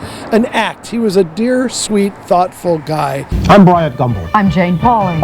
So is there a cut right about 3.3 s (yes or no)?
yes